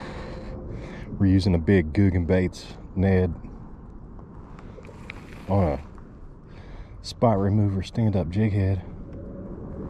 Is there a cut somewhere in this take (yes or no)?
no